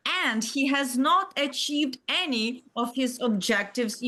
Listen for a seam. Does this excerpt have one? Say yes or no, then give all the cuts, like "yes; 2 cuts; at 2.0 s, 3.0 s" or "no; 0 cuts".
no; 0 cuts